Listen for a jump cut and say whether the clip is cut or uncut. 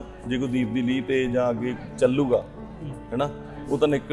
uncut